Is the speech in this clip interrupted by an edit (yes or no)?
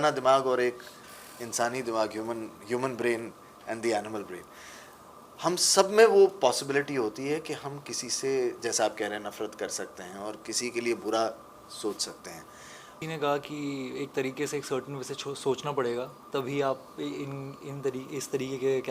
yes